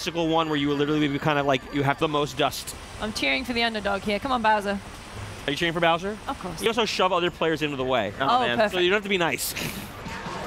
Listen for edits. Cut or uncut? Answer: cut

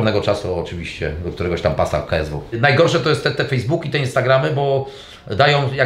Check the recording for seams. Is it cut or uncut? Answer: cut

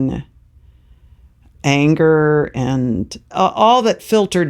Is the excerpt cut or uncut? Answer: cut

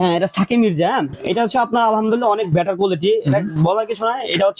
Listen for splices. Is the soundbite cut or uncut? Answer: uncut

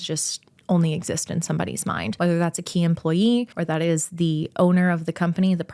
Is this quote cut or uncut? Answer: cut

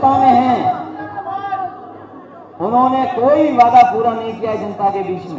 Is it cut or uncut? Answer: uncut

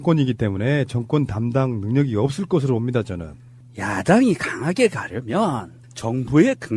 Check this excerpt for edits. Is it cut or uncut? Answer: cut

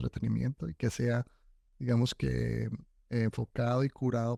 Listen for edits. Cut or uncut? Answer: uncut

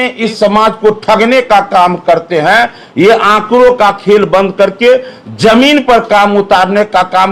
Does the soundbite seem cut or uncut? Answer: uncut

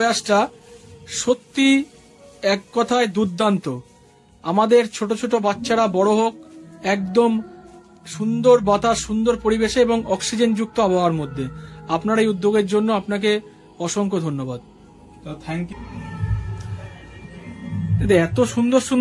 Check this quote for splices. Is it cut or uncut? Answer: cut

